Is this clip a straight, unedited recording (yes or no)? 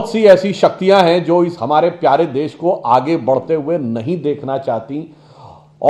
yes